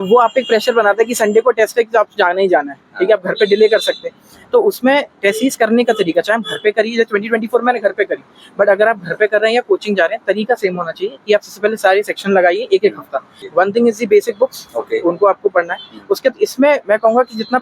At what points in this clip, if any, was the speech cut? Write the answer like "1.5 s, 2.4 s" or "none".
13.4 s